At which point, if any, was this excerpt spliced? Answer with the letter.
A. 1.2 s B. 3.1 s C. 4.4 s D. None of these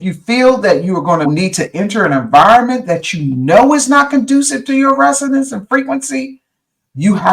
A